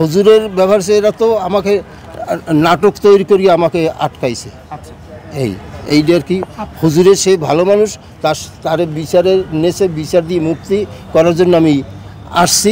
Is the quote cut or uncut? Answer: uncut